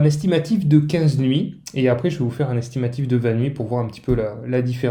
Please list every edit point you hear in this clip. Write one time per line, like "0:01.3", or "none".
none